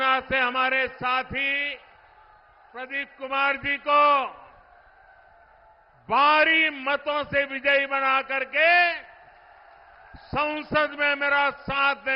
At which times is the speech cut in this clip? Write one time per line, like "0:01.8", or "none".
none